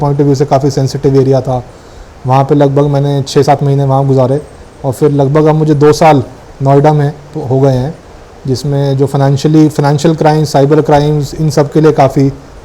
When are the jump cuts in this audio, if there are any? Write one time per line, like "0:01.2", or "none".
none